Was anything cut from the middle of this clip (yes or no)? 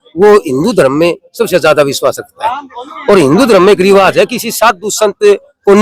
no